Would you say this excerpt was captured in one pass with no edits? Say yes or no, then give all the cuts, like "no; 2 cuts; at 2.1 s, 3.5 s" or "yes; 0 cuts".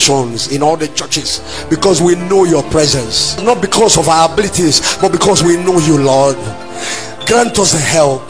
yes; 0 cuts